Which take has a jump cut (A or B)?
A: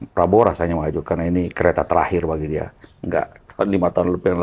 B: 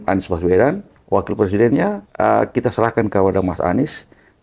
B